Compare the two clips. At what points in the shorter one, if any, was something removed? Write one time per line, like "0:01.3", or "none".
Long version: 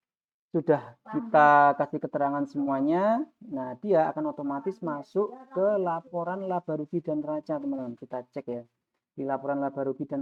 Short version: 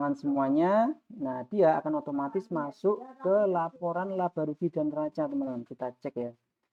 none

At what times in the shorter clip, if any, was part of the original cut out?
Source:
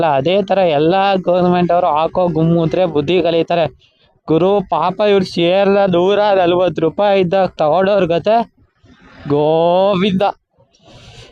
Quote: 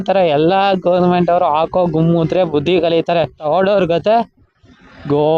0:03.4

